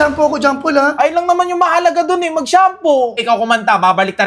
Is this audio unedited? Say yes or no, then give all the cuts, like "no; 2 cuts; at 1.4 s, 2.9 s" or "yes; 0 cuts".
no; 1 cut; at 3.2 s